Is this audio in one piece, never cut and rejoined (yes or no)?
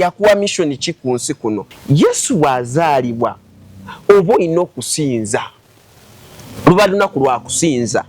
no